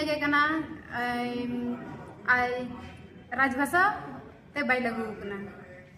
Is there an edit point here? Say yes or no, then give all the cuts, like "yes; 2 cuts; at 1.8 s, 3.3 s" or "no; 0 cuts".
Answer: no; 0 cuts